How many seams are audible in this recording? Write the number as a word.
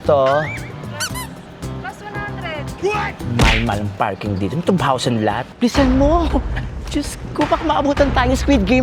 one